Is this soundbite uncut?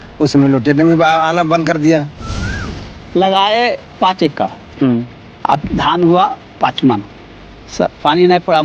no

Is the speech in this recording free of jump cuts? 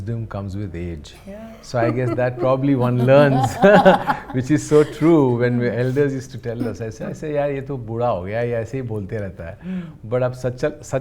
yes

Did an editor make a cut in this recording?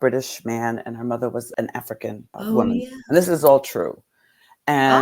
yes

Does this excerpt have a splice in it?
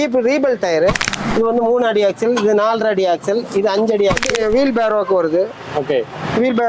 yes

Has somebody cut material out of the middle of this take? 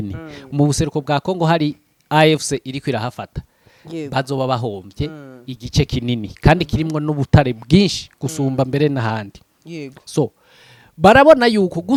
no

